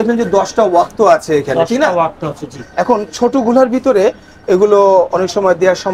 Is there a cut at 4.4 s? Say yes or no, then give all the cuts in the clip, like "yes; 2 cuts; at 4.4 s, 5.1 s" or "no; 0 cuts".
no; 0 cuts